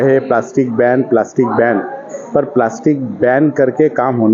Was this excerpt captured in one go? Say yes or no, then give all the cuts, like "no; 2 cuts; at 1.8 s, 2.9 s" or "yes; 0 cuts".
yes; 0 cuts